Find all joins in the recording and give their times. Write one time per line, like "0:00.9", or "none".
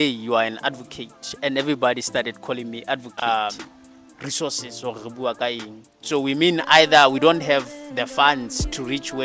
0:03.1